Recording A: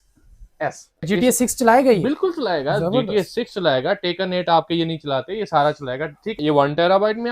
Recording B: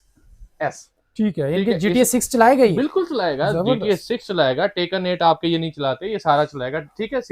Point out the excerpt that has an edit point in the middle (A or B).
A